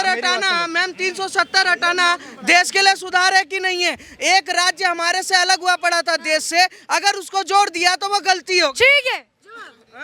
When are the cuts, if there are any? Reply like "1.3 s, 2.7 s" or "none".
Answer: none